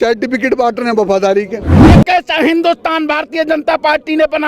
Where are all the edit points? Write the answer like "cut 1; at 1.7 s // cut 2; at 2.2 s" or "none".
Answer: cut 1; at 1.7 s